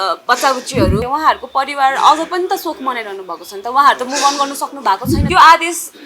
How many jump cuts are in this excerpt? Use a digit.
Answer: 2